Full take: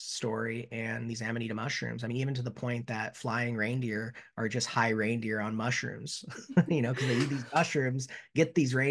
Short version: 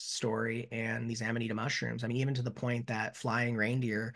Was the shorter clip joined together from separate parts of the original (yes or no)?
no